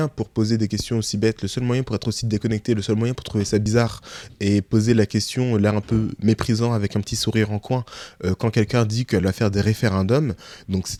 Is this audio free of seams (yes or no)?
yes